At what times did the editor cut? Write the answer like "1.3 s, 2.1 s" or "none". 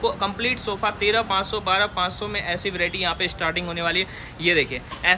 none